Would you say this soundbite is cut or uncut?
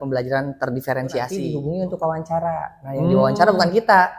cut